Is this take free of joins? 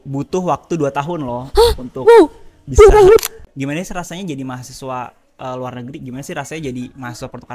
no; 1 cut; at 3.4 s

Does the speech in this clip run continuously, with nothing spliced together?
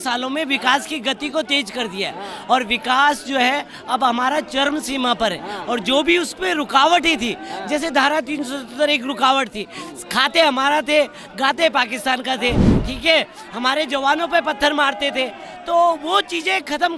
yes; 0 cuts

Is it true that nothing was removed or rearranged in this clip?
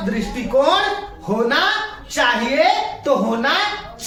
yes; 0 cuts

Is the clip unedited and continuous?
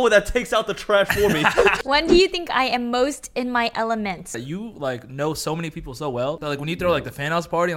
no; 3 cuts; at 1.8 s, 4.4 s, 6.4 s

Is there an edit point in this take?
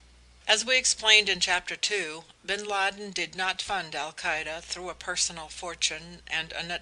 no; 0 cuts

